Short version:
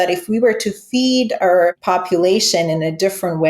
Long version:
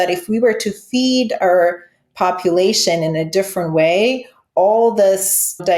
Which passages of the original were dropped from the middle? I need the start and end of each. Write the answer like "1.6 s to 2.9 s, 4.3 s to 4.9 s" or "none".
1.8 s to 2.1 s